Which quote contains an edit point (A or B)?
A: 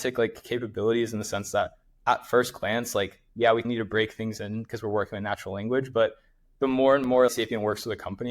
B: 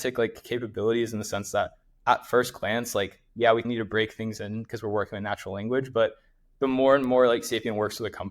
A